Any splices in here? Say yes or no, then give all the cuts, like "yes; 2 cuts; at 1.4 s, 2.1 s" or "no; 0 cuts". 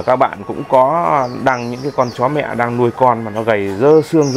no; 0 cuts